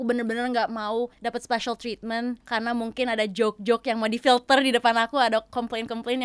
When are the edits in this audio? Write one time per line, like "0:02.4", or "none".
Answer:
0:01.1
0:02.4